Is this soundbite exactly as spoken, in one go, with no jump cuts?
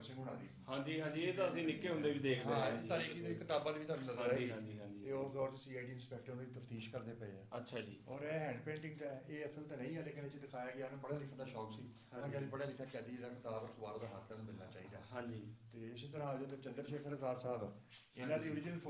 yes; 0 cuts

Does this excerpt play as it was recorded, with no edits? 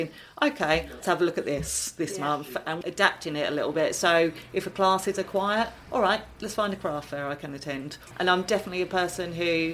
no; 3 cuts; at 1.0 s, 2.8 s, 8.0 s

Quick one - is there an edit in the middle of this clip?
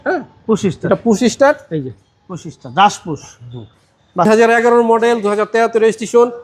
yes; 1 cut; at 4.3 s

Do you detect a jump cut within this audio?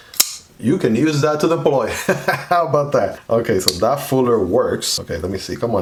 no; 0 cuts

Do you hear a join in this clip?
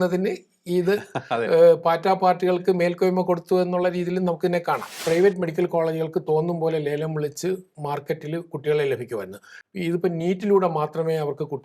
yes; 1 cut; at 4.9 s

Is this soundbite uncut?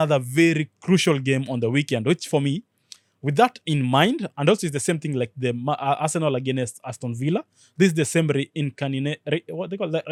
yes; 0 cuts

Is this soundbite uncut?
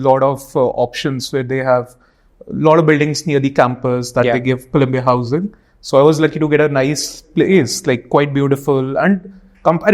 yes; 0 cuts

